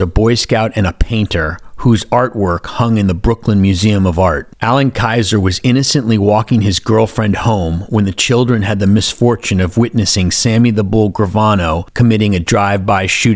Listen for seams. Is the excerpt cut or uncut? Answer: cut